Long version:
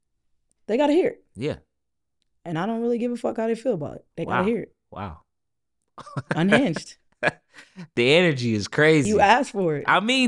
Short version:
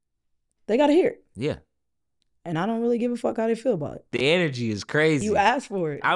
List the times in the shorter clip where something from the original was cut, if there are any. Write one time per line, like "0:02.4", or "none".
0:04.0